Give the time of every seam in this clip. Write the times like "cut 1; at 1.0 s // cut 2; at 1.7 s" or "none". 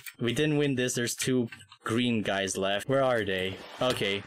cut 1; at 2.8 s

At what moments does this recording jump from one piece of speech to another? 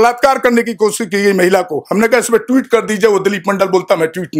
none

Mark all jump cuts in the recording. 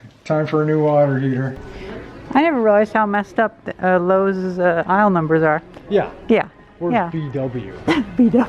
cut 1; at 1.6 s

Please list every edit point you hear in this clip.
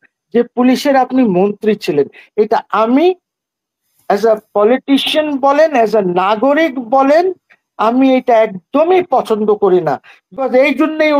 cut 1; at 10.2 s

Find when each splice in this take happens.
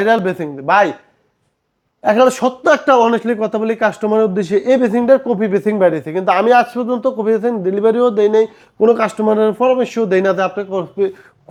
none

